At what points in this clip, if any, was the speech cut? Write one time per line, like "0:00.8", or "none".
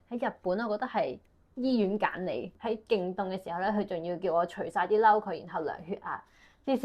0:02.5